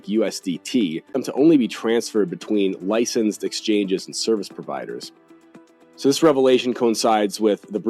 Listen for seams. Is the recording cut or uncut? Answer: cut